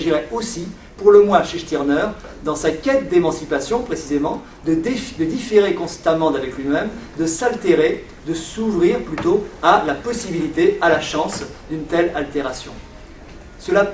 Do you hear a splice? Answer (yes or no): yes